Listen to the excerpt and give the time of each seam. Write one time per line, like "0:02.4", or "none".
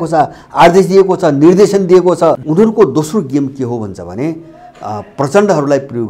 0:02.4